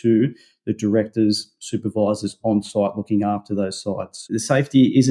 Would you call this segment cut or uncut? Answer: cut